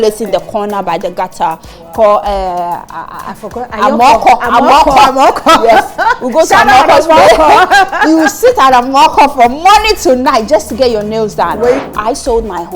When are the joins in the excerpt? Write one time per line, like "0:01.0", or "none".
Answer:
0:11.8